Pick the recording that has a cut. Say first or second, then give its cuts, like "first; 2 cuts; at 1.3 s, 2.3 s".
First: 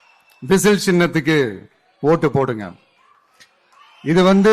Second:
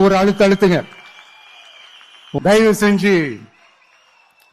second; 1 cut; at 2.4 s